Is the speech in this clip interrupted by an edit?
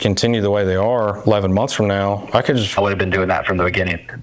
yes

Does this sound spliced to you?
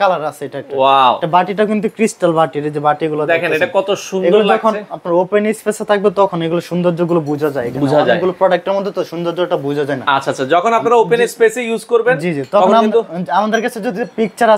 no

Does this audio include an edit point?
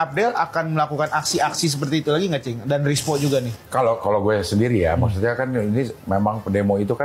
no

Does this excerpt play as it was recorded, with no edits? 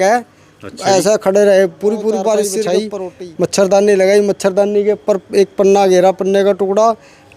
no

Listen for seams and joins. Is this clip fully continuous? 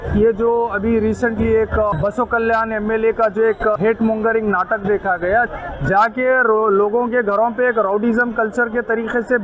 no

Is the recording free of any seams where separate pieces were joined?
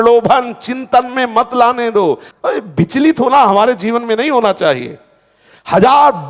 no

